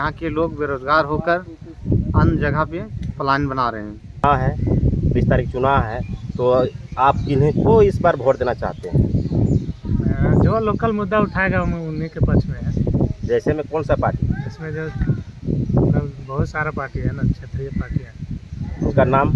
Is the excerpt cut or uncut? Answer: cut